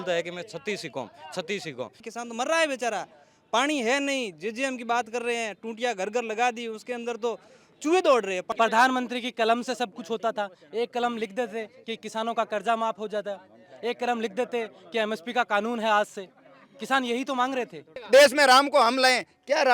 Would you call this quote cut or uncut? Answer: cut